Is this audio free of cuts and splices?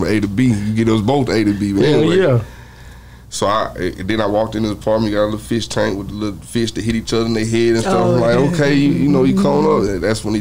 yes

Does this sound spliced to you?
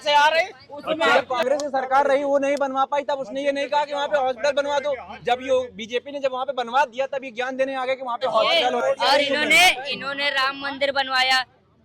yes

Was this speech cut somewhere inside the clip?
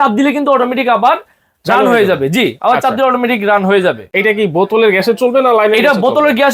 no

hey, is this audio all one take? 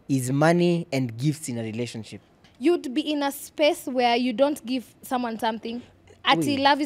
no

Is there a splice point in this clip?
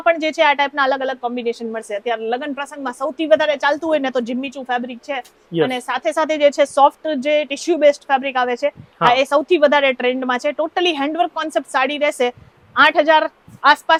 no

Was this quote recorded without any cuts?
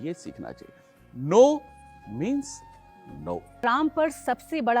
no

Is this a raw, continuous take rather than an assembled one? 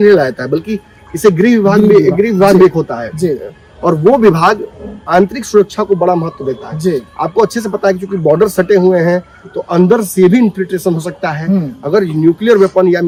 yes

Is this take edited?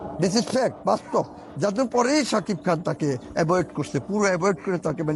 no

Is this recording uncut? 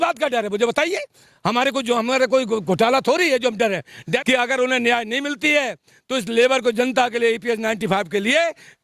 no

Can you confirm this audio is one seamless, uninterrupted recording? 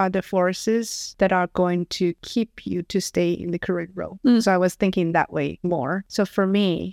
yes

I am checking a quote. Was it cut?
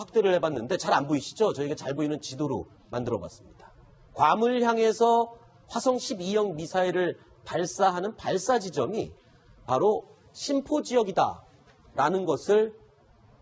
yes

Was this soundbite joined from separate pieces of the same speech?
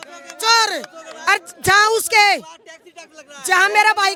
no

